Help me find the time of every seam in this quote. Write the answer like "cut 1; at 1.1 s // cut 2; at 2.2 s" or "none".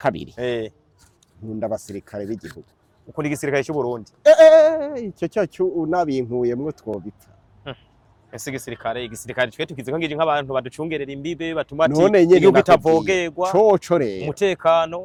none